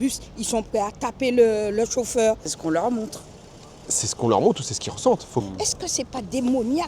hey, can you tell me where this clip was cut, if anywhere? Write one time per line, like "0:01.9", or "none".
0:02.5
0:05.4